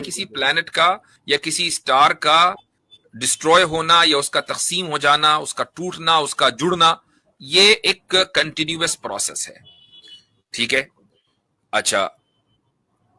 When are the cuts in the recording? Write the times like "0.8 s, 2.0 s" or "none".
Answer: 1.1 s